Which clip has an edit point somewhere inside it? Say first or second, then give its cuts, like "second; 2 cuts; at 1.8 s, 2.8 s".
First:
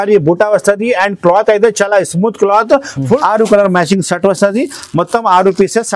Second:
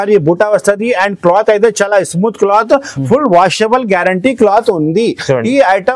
first; 1 cut; at 3.2 s